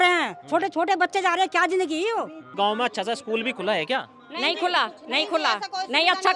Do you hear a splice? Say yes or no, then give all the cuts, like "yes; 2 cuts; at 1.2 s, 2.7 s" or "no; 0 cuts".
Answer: yes; 1 cut; at 2.5 s